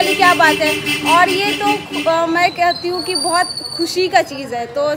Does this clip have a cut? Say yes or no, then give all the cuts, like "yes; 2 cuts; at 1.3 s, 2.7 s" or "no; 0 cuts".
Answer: no; 0 cuts